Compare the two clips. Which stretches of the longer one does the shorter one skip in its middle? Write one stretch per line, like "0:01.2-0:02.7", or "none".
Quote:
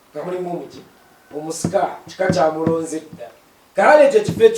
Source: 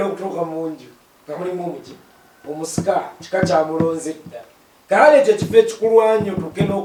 none

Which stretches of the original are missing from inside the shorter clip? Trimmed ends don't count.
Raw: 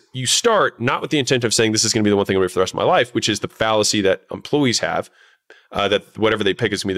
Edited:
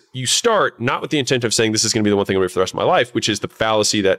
none

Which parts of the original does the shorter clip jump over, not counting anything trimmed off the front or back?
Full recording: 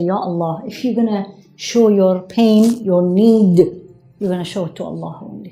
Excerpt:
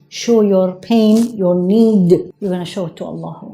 0:03.8-0:04.1

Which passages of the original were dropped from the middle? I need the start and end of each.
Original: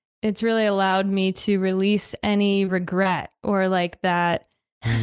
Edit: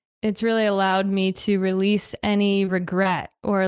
none

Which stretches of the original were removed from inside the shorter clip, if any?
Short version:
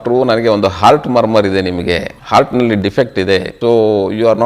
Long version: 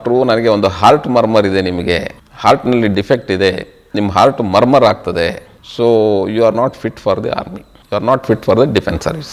0:02.1-0:02.3
0:03.6-0:05.7

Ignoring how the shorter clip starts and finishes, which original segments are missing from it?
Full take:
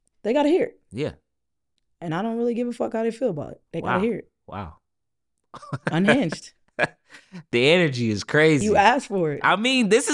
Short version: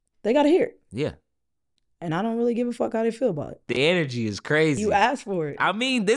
0:03.5-0:07.4

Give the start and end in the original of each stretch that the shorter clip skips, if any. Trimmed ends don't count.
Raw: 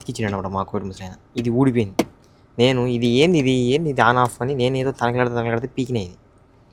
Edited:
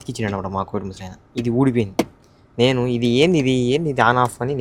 none

